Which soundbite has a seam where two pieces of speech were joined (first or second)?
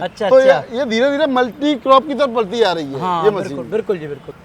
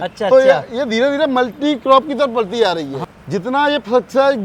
second